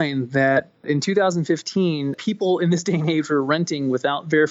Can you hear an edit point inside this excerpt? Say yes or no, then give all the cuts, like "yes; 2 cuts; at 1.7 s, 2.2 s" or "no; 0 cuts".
yes; 2 cuts; at 0.8 s, 2.1 s